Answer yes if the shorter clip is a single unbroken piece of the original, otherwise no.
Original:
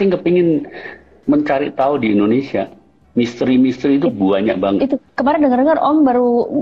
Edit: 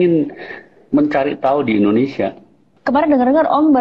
no